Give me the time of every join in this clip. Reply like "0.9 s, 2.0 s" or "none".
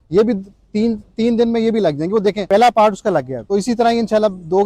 2.4 s, 3.4 s